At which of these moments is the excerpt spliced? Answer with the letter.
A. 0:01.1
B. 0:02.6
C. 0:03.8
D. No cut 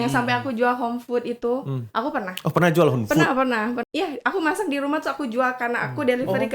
C